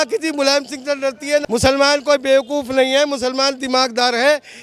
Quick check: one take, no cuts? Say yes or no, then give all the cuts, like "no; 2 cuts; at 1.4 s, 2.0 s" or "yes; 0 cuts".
no; 1 cut; at 1.4 s